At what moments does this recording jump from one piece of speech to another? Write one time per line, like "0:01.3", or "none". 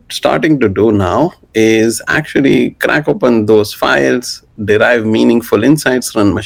none